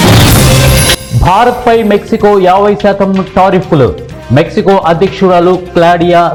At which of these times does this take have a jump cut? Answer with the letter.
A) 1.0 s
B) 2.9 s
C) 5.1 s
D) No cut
D